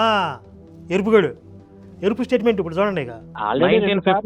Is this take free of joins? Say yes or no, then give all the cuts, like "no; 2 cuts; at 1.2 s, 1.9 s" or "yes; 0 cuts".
no; 1 cut; at 3.4 s